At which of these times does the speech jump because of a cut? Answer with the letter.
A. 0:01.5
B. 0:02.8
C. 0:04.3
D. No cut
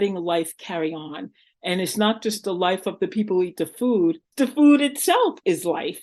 C